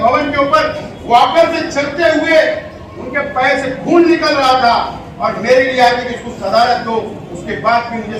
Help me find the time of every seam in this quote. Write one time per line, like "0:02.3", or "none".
none